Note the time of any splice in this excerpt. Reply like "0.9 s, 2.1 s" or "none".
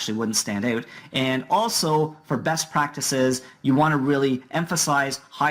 1.3 s